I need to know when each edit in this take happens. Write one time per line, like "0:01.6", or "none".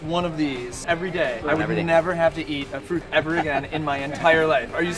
0:01.0
0:02.9